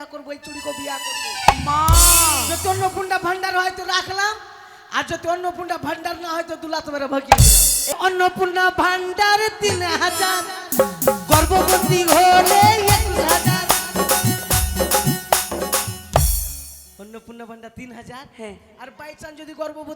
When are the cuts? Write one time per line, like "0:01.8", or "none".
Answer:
0:07.9